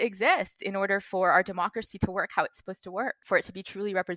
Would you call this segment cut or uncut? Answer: cut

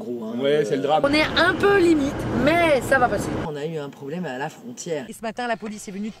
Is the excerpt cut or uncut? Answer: cut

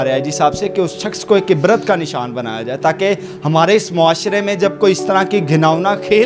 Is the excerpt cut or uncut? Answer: uncut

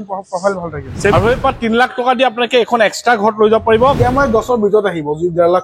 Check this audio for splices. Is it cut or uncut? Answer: cut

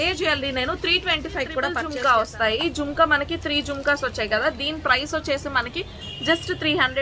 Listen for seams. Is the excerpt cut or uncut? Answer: cut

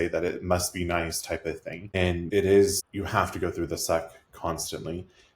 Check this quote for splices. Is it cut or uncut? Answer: cut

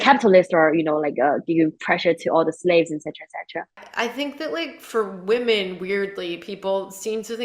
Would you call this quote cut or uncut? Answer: cut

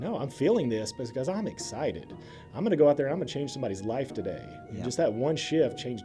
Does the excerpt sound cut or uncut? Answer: cut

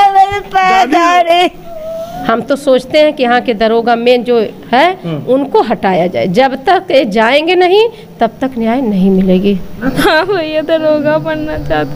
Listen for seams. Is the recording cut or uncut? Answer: cut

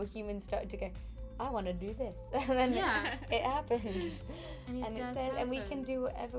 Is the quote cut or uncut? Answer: uncut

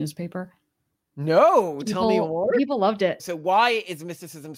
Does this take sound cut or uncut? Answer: cut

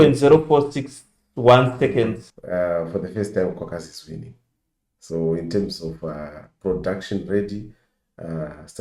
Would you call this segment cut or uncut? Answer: cut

